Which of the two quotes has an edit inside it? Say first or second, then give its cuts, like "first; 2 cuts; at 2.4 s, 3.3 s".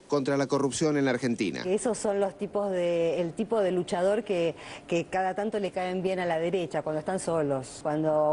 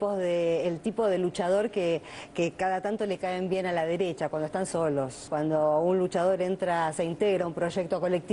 first; 1 cut; at 1.6 s